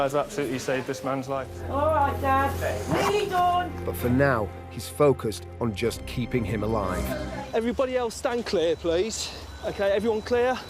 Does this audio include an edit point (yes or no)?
yes